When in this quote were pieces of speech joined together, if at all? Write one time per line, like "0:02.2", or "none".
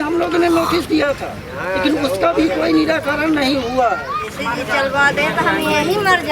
0:04.2